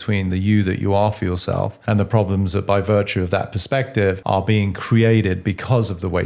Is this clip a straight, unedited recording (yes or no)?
no